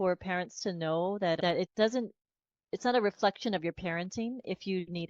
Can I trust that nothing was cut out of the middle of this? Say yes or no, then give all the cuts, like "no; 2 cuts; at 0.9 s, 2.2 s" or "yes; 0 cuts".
no; 1 cut; at 1.4 s